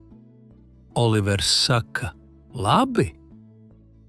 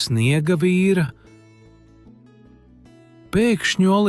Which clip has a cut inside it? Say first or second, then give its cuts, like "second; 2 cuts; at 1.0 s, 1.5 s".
first; 2 cuts; at 0.9 s, 3.1 s